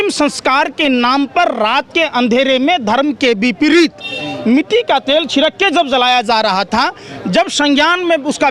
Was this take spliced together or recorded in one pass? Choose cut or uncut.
uncut